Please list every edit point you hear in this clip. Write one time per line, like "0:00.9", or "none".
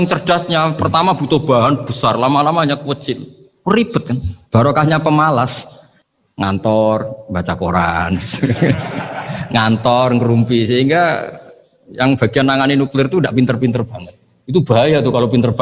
none